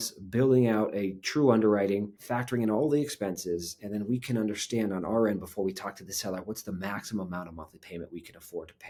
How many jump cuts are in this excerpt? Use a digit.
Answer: 0